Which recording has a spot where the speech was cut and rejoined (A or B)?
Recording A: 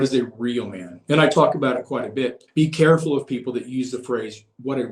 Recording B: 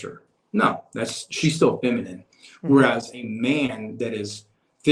A